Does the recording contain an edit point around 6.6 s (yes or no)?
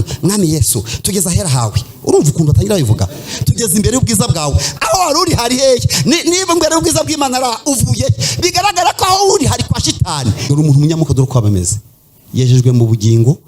no